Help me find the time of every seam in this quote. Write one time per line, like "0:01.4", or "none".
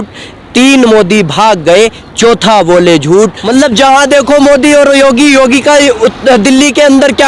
0:03.4